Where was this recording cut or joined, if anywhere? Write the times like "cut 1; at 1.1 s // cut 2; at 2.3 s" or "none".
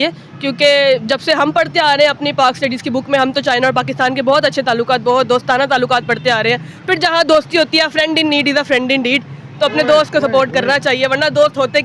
none